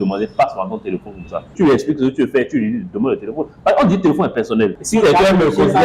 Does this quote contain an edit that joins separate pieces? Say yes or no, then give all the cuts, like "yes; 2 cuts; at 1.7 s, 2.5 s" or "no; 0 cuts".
yes; 2 cuts; at 1.5 s, 4.8 s